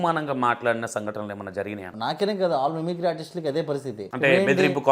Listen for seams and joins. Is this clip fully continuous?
no; 2 cuts; at 1.9 s, 4.0 s

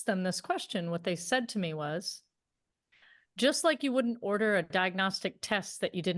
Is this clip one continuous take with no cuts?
yes; 0 cuts

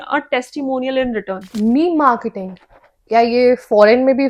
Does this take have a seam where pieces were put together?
yes; 1 cut; at 1.4 s

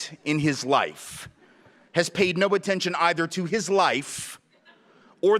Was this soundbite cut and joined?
no; 0 cuts

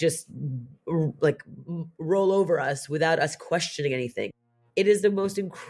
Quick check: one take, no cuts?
no; 1 cut; at 4.3 s

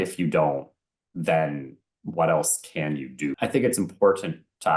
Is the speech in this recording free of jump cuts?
no; 1 cut; at 3.3 s

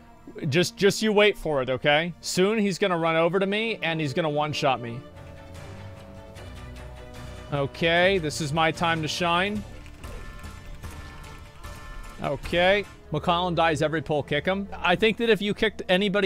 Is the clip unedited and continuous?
no; 4 cuts; at 2.2 s, 9.8 s, 13.0 s, 14.7 s

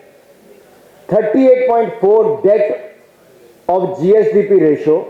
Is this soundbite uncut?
yes; 0 cuts

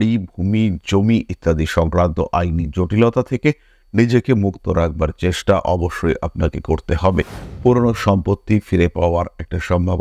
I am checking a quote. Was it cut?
yes; 1 cut; at 7.4 s

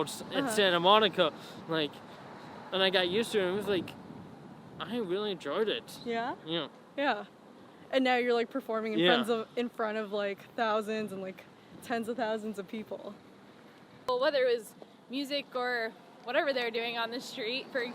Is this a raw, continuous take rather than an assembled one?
yes; 0 cuts

